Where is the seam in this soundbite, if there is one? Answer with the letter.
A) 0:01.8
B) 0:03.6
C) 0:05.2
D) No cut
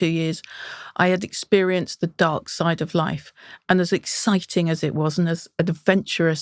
D